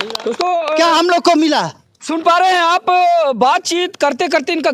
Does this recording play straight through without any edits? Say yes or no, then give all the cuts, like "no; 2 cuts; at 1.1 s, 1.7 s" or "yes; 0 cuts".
yes; 0 cuts